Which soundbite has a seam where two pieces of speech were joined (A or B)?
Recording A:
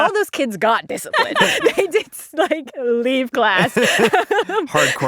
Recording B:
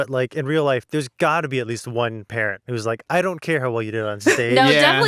A